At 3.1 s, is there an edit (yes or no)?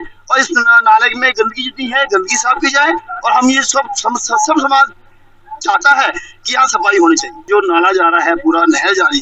no